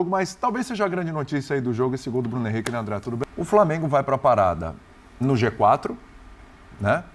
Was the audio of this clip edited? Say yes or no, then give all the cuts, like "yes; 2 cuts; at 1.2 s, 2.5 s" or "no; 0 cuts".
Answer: yes; 1 cut; at 3.2 s